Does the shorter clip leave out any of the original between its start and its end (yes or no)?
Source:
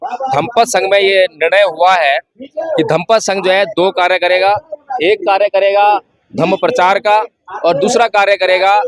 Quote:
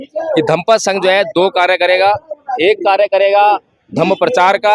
no